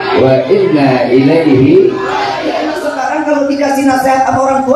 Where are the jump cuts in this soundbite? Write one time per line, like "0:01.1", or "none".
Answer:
0:02.6